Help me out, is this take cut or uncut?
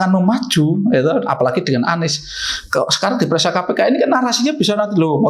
uncut